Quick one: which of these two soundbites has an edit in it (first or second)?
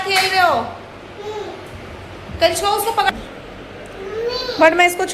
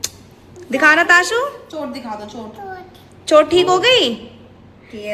first